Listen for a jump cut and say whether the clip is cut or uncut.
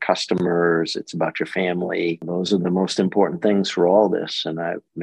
cut